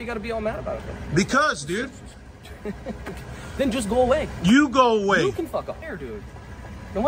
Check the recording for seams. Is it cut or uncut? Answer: cut